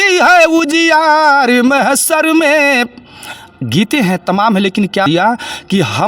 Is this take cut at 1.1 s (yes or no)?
no